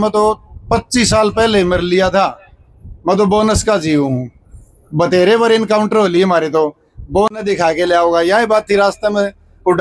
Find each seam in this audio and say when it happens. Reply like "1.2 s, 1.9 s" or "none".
none